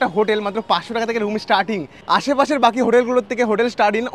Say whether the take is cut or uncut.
uncut